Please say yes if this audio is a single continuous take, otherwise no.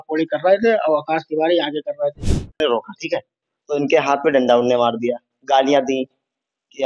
no